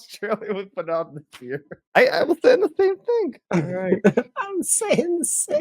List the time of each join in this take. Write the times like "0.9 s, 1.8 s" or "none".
1.8 s, 3.4 s